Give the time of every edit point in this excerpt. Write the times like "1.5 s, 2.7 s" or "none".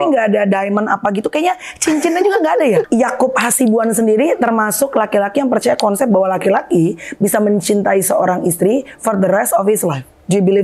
2.9 s